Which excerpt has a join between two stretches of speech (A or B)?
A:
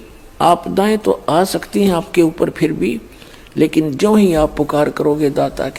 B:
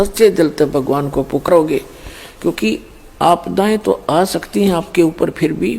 B